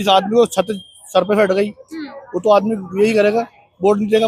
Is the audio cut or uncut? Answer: uncut